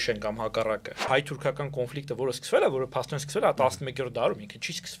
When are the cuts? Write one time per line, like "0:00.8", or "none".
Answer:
0:01.1